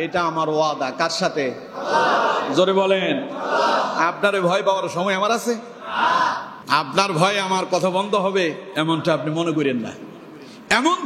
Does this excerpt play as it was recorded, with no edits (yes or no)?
no